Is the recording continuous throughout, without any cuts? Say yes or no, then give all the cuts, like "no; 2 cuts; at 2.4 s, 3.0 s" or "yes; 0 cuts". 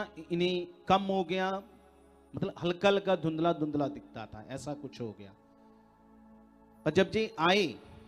yes; 0 cuts